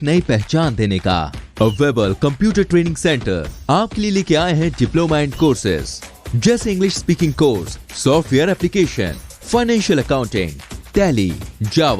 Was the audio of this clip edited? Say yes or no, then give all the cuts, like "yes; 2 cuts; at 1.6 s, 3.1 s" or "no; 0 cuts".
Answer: no; 0 cuts